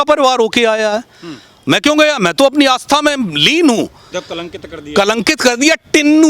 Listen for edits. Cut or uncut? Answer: cut